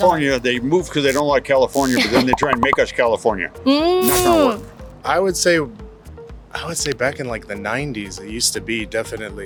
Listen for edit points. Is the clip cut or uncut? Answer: uncut